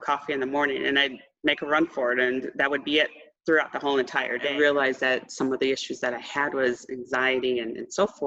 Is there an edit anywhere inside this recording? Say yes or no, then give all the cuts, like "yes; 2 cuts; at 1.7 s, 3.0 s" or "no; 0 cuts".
yes; 1 cut; at 4.5 s